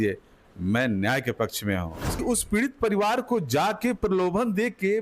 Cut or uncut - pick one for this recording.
cut